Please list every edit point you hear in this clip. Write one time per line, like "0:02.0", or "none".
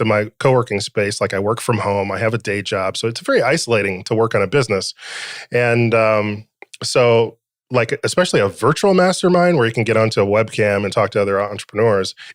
none